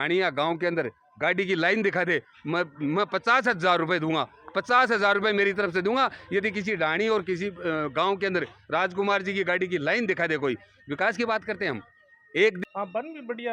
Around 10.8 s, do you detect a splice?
no; 1 cut; at 12.6 s

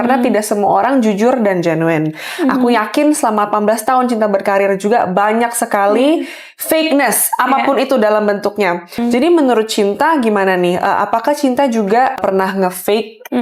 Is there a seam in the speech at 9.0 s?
yes; 2 cuts; at 9.0 s, 12.2 s

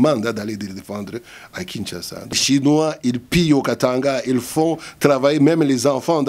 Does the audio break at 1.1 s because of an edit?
no; 1 cut; at 2.4 s

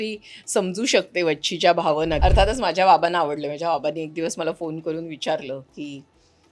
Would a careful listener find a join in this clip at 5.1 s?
no; 1 cut; at 2.2 s

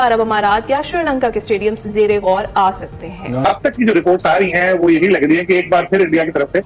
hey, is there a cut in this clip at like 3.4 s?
yes; 1 cut; at 3.4 s

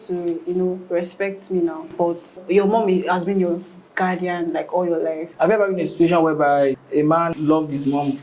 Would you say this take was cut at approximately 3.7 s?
no; 3 cuts; at 2.3 s, 5.2 s, 7.2 s

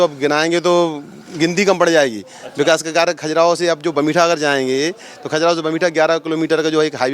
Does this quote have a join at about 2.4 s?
no; 0 cuts

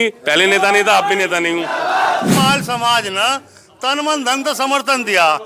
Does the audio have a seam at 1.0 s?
no; 1 cut; at 2.3 s

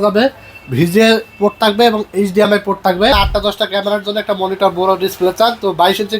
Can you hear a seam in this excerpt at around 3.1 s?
yes; 1 cut; at 3.1 s

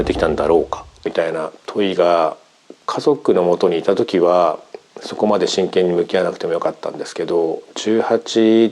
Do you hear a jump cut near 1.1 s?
yes; 1 cut; at 1.1 s

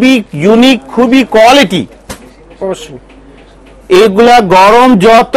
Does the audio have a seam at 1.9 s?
no; 0 cuts

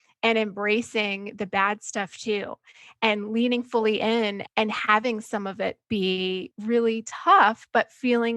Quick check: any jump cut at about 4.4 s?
yes; 2 cuts; at 4.4 s, 6.5 s

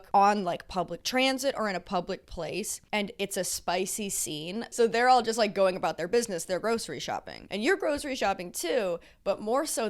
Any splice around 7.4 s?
yes; 2 cuts; at 4.7 s, 7.4 s

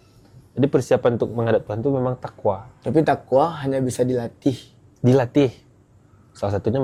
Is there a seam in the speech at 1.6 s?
no; 0 cuts

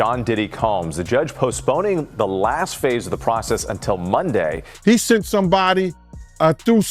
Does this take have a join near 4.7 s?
yes; 1 cut; at 4.7 s

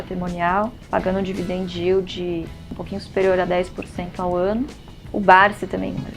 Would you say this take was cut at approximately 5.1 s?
yes; 1 cut; at 5.1 s

